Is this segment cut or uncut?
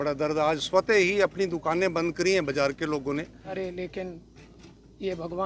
cut